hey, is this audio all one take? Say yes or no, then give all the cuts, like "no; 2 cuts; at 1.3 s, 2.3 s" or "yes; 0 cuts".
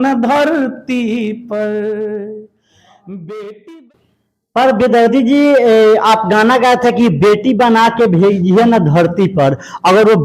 no; 1 cut; at 3.8 s